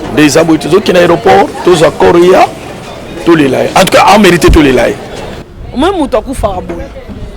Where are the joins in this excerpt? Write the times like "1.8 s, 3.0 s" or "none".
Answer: 5.4 s